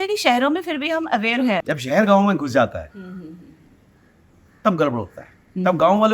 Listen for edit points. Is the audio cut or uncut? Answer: cut